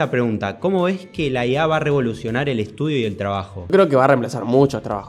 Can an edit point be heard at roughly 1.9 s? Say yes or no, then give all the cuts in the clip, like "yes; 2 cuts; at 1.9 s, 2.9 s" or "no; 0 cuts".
no; 1 cut; at 3.7 s